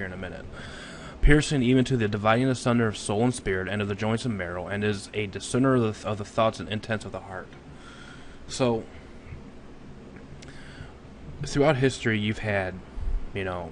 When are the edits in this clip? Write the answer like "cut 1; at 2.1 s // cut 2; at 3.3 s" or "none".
cut 1; at 3.7 s